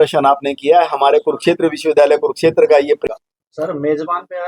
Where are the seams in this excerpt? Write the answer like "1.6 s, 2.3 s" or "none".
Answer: 3.0 s